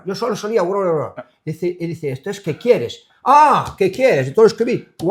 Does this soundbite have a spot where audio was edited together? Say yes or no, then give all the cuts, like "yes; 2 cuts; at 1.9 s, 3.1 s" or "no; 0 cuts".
no; 0 cuts